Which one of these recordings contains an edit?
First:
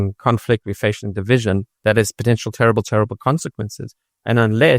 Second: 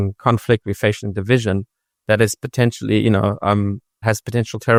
first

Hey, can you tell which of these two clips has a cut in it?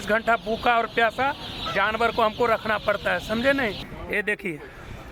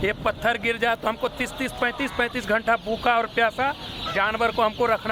first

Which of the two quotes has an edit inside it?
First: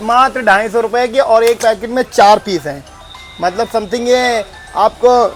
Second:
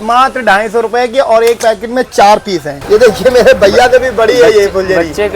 second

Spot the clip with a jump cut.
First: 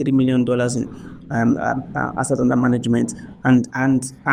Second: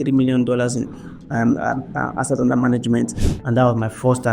second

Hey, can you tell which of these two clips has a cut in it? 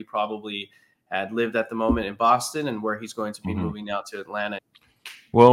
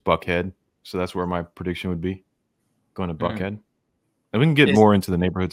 first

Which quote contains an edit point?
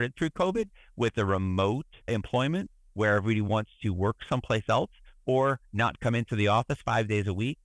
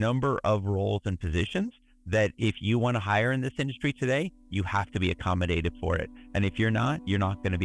first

